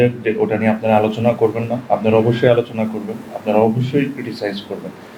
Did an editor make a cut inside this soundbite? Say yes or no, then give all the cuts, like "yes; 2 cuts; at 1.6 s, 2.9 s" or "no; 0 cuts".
no; 0 cuts